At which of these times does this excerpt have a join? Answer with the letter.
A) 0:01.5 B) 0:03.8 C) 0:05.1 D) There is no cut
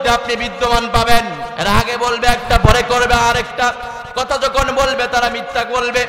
A